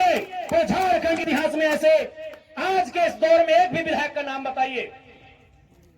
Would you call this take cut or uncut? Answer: cut